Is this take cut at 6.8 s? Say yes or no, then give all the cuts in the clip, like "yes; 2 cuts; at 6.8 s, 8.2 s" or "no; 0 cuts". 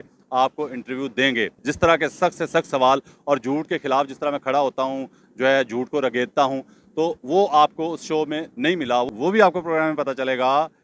no; 2 cuts; at 1.6 s, 9.1 s